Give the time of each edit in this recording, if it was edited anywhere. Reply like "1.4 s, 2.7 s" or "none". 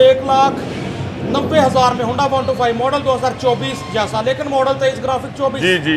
none